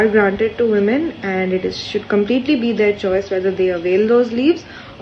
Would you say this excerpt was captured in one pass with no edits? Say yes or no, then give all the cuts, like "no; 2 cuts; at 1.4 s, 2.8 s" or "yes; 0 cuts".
yes; 0 cuts